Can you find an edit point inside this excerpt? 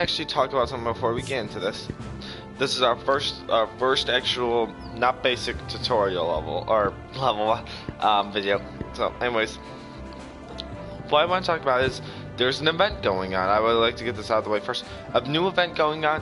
no; 0 cuts

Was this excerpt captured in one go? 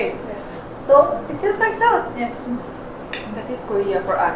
yes; 0 cuts

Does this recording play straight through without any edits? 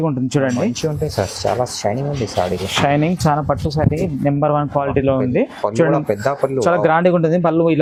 yes; 0 cuts

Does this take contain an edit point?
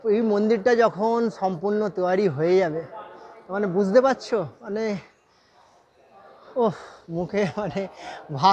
no; 0 cuts

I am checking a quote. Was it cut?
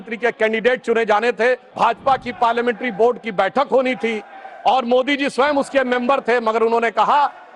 yes; 1 cut; at 1.7 s

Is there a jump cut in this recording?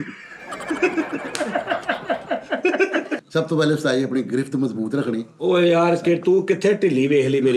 yes; 1 cut; at 3.2 s

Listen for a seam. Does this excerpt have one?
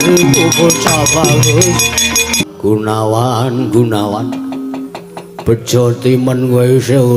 yes; 1 cut; at 2.5 s

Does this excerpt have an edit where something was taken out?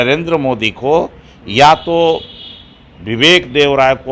no; 0 cuts

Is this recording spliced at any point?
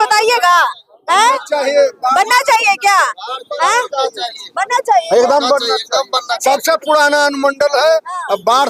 no; 0 cuts

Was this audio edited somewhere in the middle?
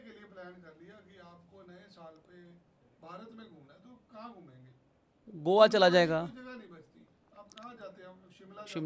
no; 0 cuts

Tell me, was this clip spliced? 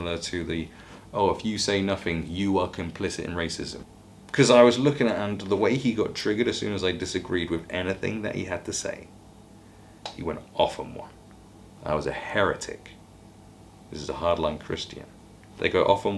yes; 1 cut; at 3.8 s

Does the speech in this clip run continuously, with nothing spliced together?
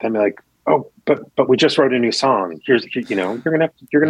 yes; 0 cuts

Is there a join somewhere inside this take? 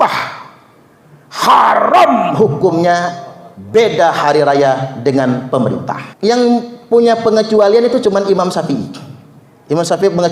yes; 1 cut; at 6.0 s

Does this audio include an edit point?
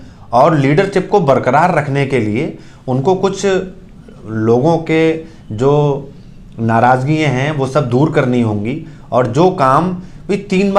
no; 0 cuts

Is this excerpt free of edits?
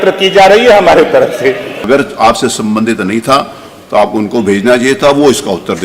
no; 1 cut; at 1.8 s

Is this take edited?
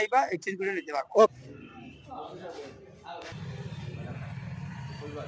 yes; 1 cut; at 1.4 s

